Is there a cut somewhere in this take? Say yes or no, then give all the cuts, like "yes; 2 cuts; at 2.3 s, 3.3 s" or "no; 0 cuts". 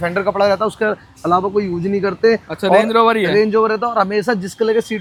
no; 0 cuts